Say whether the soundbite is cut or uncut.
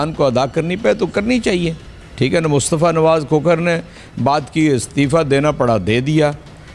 uncut